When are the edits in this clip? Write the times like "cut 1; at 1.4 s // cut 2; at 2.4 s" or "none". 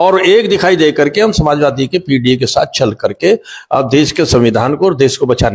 none